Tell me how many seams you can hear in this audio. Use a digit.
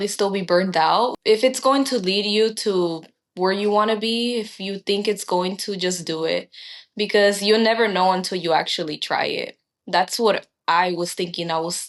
1